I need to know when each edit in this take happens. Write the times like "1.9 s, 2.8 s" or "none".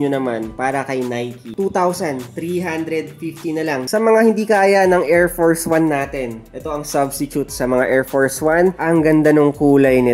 1.5 s, 3.9 s, 8.8 s

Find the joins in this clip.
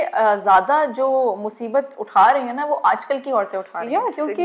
none

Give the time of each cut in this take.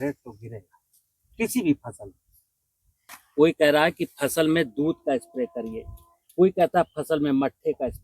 3.0 s

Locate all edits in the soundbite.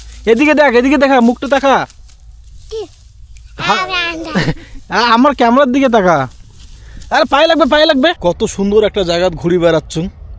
8.2 s

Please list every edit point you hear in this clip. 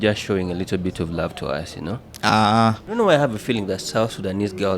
2.9 s

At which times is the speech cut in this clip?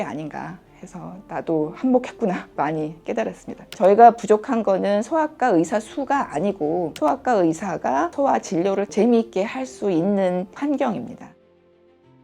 3.6 s, 11.3 s

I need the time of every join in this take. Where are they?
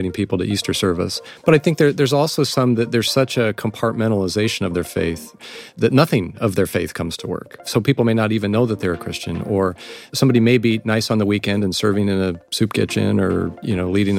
1.2 s, 5.4 s

